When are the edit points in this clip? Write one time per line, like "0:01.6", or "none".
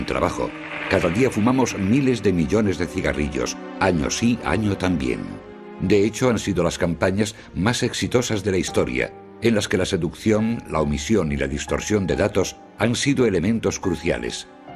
none